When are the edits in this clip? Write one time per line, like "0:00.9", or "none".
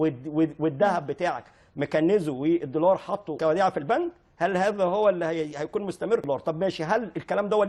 0:03.3
0:06.2